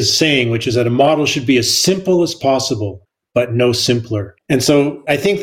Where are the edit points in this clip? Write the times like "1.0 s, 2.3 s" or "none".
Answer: none